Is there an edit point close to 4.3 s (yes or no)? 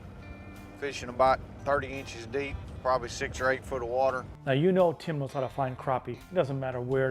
yes